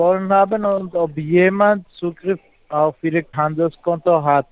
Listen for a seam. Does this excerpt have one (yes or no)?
yes